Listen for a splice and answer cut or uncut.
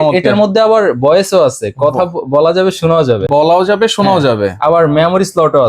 uncut